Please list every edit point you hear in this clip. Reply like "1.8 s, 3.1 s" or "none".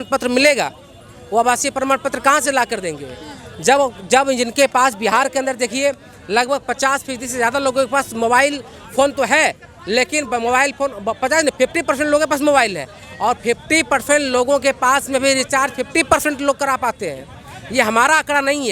none